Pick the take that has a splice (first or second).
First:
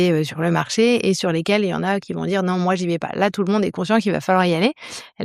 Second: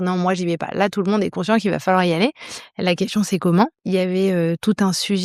second